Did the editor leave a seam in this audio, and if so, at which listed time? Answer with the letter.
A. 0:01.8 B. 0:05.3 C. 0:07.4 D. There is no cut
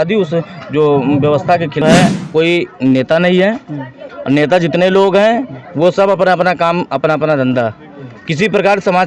A